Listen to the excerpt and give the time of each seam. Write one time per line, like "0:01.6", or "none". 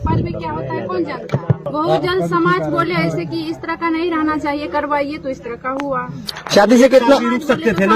0:01.7